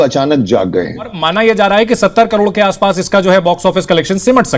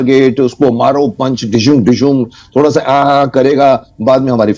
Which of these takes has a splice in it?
first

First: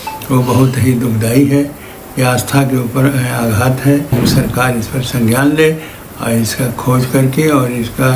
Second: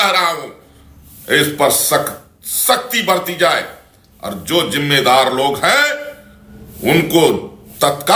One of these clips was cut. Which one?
first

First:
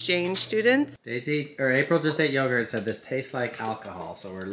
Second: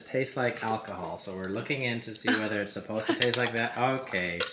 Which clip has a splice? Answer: first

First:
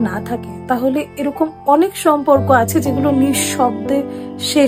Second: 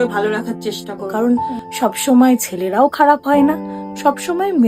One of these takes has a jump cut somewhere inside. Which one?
second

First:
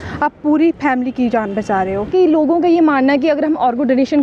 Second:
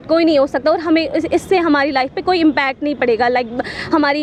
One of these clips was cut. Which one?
first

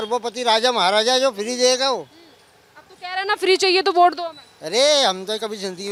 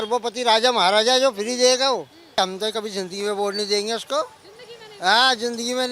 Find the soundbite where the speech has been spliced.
second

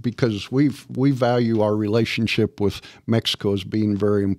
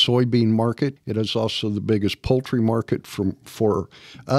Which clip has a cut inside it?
second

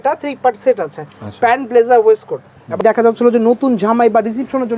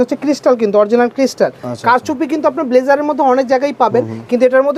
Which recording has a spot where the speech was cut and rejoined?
first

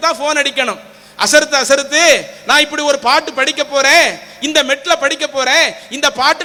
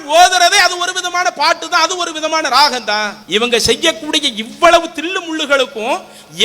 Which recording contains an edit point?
second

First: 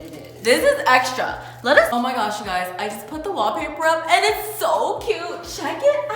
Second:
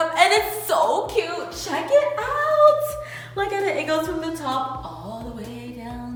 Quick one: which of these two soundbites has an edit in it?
first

